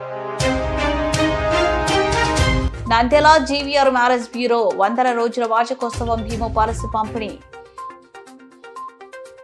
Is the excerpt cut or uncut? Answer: uncut